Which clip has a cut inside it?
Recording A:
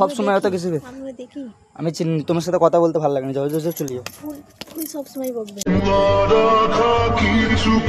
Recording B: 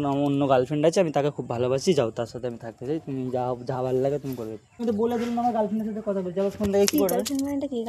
B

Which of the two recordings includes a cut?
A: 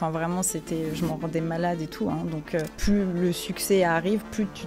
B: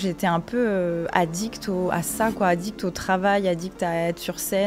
A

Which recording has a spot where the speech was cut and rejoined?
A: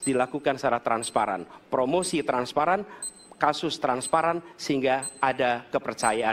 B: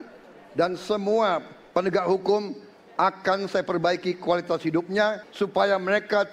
B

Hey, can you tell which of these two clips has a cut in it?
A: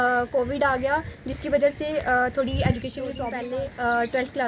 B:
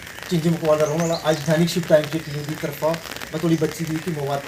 A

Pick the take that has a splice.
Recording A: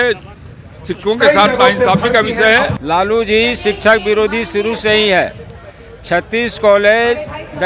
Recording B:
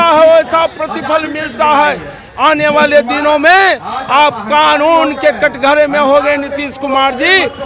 A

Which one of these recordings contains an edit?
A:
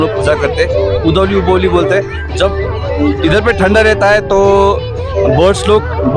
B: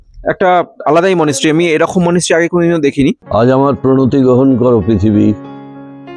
B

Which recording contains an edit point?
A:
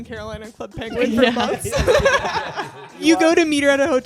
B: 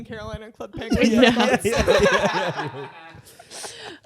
A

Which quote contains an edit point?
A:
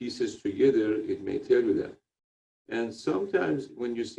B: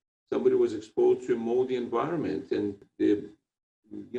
B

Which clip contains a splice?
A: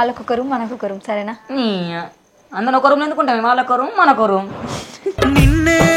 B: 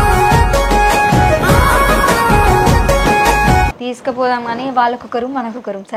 B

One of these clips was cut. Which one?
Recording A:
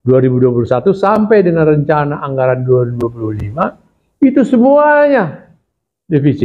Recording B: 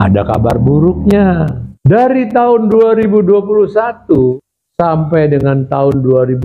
B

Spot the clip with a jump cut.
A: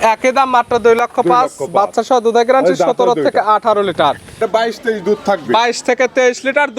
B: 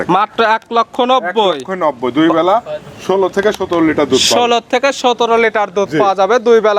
A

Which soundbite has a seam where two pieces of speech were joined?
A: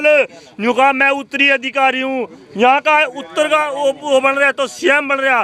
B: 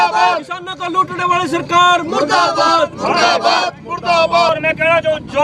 B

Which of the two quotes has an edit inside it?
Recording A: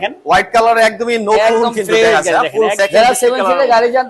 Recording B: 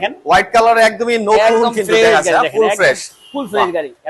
A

